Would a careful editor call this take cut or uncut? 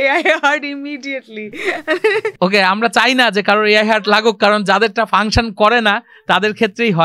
uncut